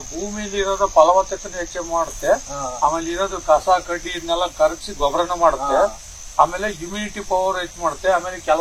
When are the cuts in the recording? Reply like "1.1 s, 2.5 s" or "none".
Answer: none